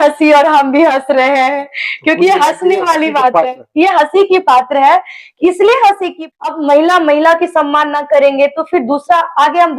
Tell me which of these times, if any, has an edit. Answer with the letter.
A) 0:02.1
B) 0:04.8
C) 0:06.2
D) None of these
C